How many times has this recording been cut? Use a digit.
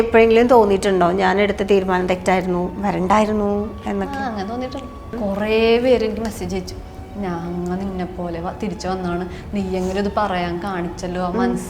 1